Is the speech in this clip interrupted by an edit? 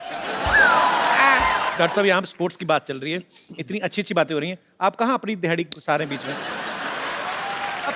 yes; 1 cut; at 1.7 s

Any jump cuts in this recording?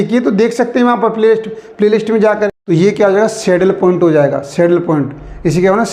yes; 1 cut; at 2.5 s

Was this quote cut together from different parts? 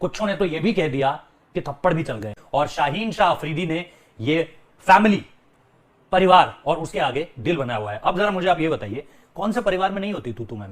yes; 1 cut; at 2.4 s

